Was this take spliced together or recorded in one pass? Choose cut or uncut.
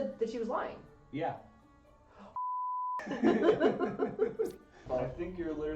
cut